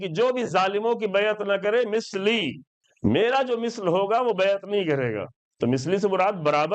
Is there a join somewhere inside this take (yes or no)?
yes